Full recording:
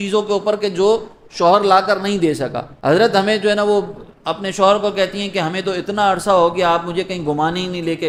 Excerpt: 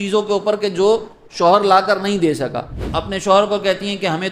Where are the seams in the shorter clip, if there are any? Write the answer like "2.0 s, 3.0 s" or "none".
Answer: 2.7 s